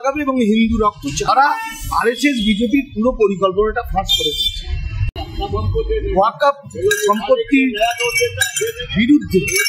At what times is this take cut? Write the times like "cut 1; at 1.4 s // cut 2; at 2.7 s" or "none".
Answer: cut 1; at 1.3 s // cut 2; at 5.2 s